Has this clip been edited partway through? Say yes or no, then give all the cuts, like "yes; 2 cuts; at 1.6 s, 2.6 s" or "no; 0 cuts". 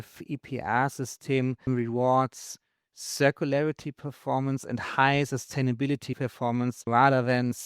yes; 2 cuts; at 1.7 s, 6.9 s